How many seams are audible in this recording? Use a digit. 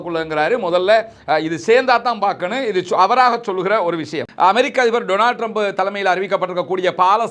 1